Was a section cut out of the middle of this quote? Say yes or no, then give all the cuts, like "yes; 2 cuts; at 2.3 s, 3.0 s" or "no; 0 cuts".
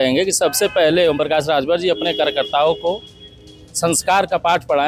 no; 0 cuts